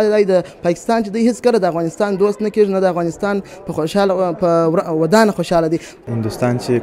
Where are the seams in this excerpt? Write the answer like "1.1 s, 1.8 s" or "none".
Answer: 5.9 s